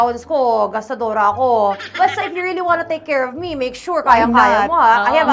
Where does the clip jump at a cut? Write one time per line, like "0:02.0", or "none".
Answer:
0:02.0